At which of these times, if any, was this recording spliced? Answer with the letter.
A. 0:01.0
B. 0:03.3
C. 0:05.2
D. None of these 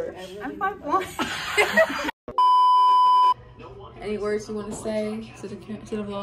B